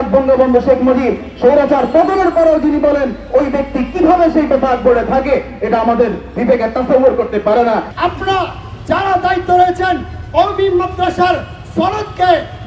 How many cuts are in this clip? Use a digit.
1